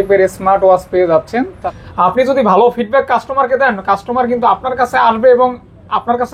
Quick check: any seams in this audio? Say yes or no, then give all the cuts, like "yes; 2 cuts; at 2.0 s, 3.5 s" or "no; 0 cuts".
yes; 1 cut; at 1.6 s